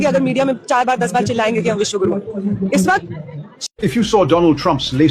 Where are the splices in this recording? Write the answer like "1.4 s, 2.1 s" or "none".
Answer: 3.6 s